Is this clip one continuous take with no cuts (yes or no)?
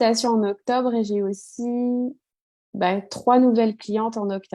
yes